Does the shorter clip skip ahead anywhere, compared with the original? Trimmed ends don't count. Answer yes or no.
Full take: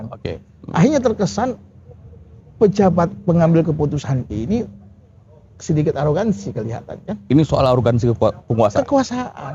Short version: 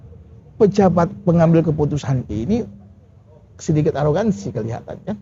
no